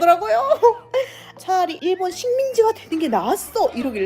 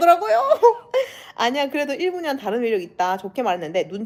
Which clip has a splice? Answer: first; 1 cut; at 1.3 s

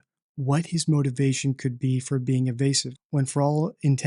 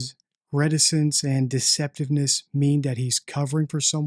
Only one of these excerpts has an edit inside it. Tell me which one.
first; 1 cut; at 2.9 s

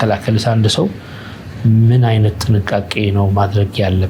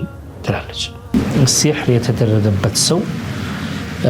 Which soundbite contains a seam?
second; 1 cut; at 1.1 s

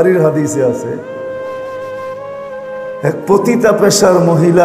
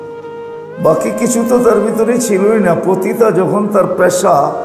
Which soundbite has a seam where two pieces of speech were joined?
first; 2 cuts; at 1.3 s, 3.0 s

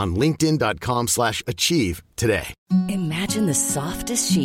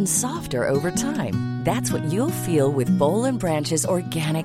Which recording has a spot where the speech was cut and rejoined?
first; 1 cut; at 2.5 s

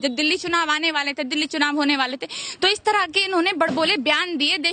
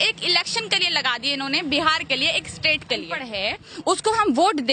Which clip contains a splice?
second; 1 cut; at 3.2 s

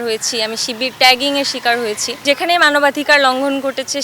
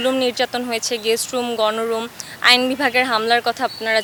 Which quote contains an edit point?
first; 1 cut; at 2.2 s

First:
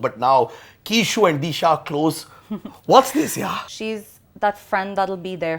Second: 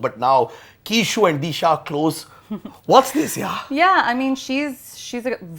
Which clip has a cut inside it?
first; 1 cut; at 3.6 s

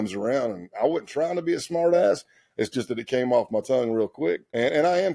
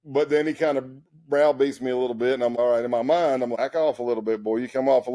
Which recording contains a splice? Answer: second; 2 cuts; at 2.5 s, 3.5 s

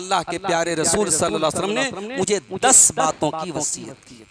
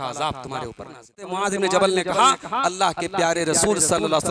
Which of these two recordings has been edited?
second; 1 cut; at 1.4 s

